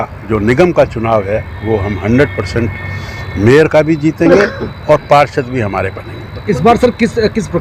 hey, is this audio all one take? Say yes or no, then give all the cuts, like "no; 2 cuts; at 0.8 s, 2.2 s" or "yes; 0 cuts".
yes; 0 cuts